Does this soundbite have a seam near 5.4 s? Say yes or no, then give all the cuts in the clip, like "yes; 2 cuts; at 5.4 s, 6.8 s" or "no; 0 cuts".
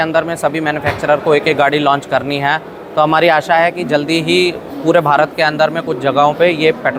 no; 0 cuts